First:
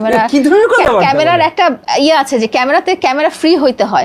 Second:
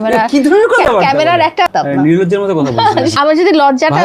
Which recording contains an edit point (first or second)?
second